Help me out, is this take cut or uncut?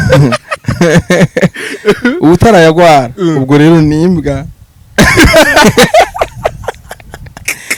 uncut